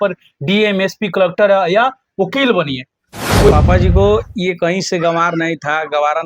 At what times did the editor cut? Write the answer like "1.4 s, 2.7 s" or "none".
3.5 s